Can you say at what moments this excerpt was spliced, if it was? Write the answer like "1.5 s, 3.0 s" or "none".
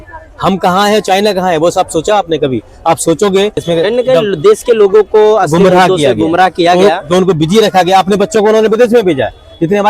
3.6 s